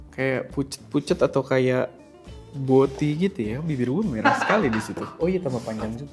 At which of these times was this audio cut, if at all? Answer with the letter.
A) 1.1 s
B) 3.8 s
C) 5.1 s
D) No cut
C